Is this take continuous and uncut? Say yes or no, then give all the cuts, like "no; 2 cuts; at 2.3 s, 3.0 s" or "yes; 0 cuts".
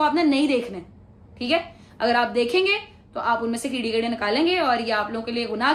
yes; 0 cuts